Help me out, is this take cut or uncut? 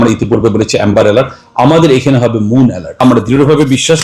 cut